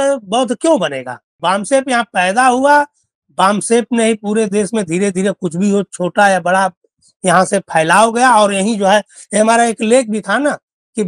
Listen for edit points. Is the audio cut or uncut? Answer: cut